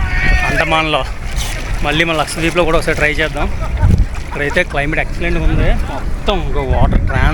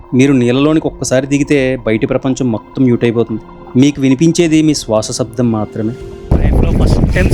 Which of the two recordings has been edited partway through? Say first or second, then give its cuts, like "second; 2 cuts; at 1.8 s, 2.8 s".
second; 1 cut; at 6.1 s